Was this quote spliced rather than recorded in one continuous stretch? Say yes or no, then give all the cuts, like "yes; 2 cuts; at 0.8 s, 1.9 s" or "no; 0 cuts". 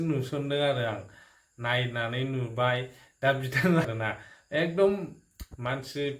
yes; 1 cut; at 3.8 s